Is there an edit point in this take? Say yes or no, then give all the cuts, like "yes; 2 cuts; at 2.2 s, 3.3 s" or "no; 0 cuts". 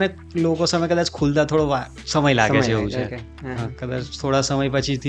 no; 0 cuts